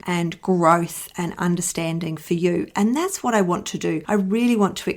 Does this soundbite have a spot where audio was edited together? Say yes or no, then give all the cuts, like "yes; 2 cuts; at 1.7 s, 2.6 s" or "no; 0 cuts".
no; 0 cuts